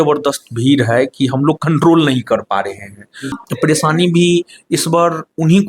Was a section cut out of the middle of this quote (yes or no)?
yes